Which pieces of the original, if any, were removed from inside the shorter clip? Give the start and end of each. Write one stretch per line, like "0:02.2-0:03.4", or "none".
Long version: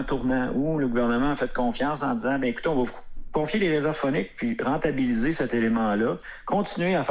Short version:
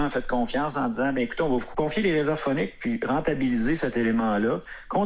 0:02.9-0:03.2